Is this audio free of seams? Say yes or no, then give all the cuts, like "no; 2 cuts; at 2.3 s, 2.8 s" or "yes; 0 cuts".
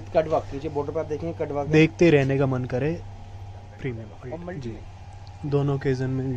no; 1 cut; at 4.5 s